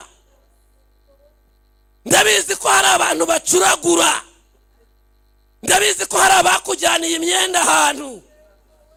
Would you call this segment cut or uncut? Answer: uncut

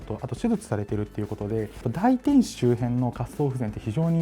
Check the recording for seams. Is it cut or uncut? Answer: cut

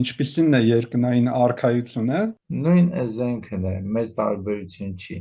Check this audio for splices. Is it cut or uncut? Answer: cut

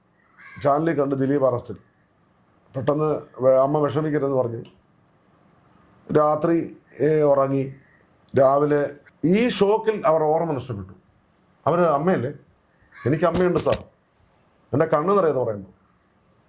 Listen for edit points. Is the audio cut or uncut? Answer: cut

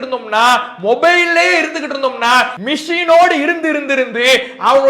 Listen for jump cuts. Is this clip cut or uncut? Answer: cut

